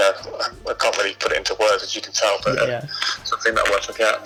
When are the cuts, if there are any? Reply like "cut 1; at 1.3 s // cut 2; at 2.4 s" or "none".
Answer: none